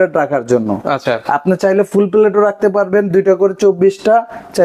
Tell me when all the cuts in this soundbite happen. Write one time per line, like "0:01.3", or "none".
none